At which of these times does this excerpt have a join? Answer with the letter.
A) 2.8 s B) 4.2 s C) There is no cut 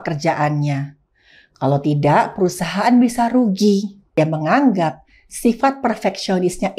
B